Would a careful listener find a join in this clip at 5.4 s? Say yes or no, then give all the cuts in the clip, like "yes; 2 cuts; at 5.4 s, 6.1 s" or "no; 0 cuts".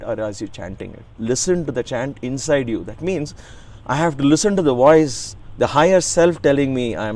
no; 1 cut; at 1.1 s